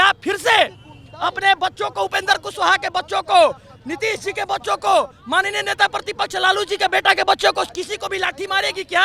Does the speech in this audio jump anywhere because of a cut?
no; 0 cuts

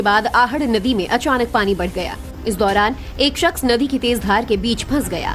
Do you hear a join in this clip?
yes; 1 cut; at 4.2 s

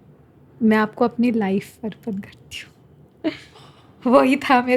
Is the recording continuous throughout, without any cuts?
yes; 0 cuts

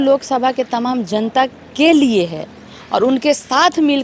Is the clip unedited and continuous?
yes; 0 cuts

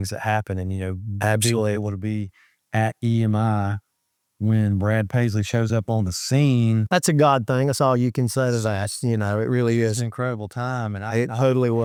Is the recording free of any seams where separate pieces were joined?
yes; 0 cuts

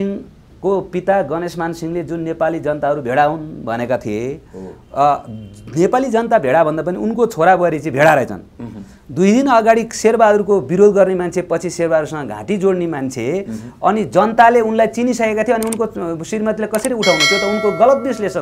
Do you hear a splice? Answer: no; 0 cuts

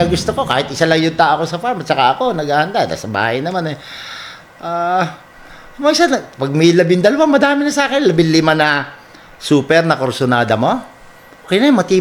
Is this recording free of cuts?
yes; 0 cuts

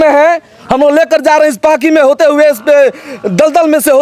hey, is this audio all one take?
yes; 0 cuts

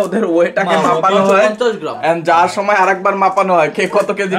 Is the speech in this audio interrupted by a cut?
no; 0 cuts

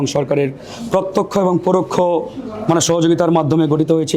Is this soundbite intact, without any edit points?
yes; 0 cuts

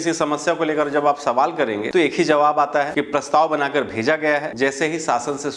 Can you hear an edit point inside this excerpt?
yes; 3 cuts; at 1.8 s, 2.9 s, 4.5 s

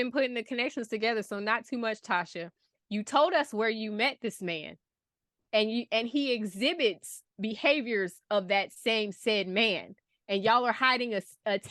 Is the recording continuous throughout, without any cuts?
yes; 0 cuts

